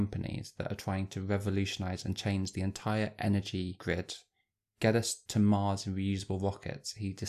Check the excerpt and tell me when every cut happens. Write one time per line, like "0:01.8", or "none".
none